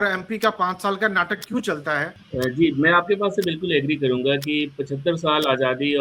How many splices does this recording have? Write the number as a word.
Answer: one